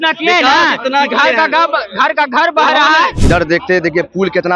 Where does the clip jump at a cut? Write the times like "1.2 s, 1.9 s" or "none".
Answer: 3.2 s